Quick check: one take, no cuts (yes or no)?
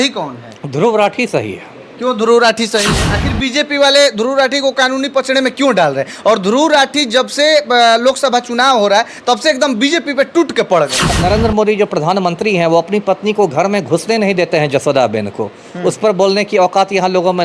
no